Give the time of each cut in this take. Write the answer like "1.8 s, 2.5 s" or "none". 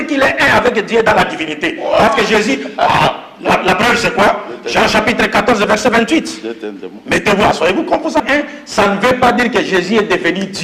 8.2 s